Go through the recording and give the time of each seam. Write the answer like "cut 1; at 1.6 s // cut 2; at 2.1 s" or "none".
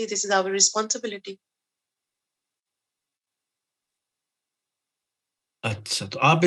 none